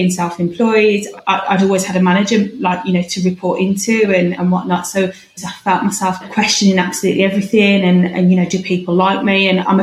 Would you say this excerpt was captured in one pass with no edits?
no; 1 cut; at 5.4 s

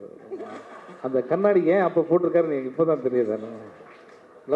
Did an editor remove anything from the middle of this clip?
no; 0 cuts

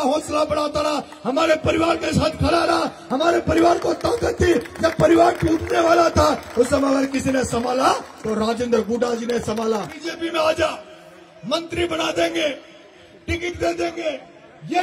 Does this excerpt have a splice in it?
yes; 1 cut; at 10.0 s

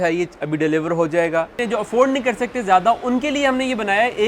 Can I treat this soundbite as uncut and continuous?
no; 1 cut; at 1.6 s

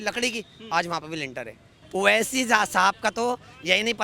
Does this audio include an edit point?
yes; 1 cut; at 1.8 s

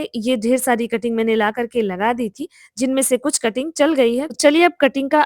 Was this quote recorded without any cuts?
no; 1 cut; at 4.3 s

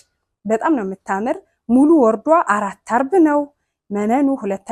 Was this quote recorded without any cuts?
yes; 0 cuts

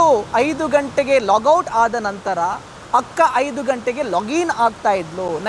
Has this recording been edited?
no; 0 cuts

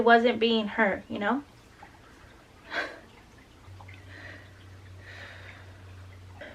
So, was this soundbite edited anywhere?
yes; 1 cut; at 3.7 s

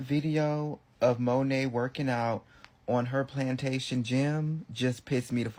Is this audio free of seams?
yes; 0 cuts

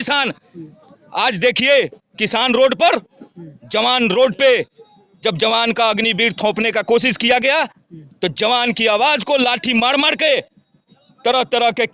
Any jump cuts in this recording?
no; 0 cuts

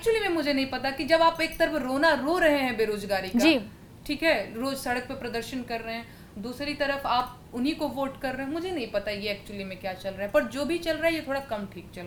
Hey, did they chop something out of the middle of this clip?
no; 0 cuts

